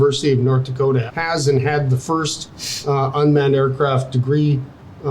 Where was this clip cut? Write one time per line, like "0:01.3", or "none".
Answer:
0:01.1

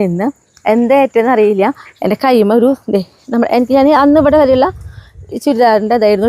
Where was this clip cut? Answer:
none

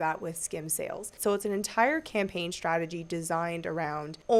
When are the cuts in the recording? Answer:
0:01.2

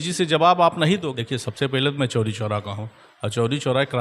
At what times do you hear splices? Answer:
0:01.1

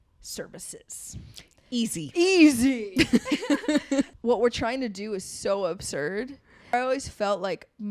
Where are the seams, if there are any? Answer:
0:04.1
0:06.7

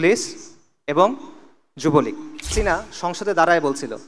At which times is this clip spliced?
0:02.5

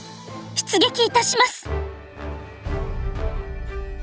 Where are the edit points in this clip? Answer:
0:01.6

